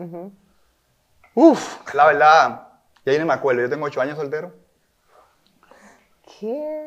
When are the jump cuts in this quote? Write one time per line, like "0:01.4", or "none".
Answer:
0:01.8